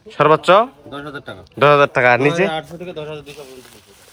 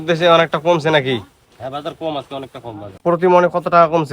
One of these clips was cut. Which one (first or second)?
second